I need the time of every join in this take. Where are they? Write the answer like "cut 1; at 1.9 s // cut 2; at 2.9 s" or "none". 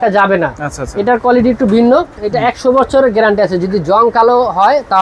cut 1; at 2.2 s